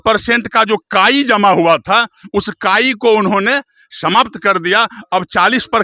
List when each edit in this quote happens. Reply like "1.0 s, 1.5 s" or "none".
none